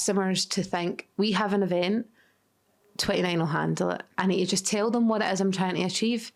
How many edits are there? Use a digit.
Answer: 0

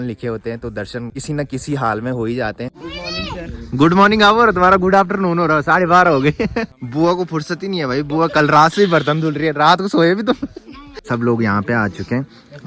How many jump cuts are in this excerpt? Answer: 4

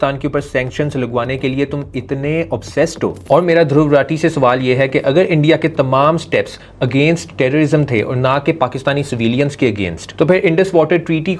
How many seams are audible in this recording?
1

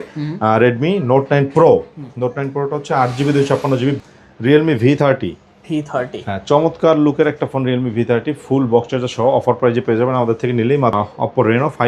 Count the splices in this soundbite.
2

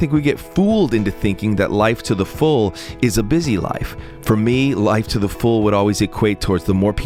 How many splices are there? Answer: 0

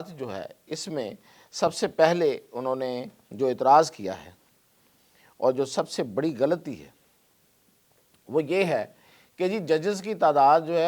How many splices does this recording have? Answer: 0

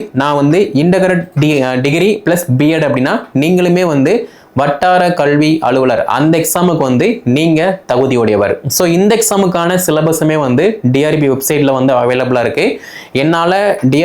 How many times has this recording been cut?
0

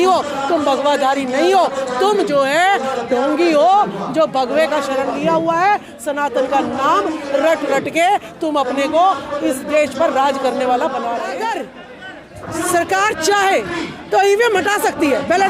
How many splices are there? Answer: 1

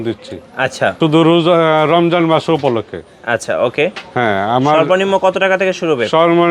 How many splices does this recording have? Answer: 1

